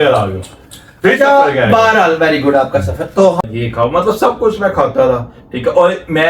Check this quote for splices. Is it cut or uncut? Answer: cut